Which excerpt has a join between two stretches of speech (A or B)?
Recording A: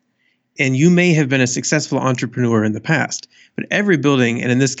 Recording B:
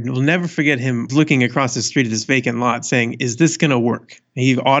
B